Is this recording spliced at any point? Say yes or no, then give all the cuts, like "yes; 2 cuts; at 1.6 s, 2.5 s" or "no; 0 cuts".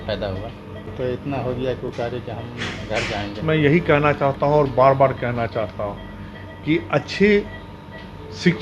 yes; 2 cuts; at 0.9 s, 3.4 s